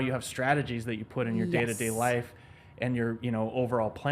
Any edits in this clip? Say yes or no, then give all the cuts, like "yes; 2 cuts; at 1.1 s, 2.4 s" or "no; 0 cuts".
no; 0 cuts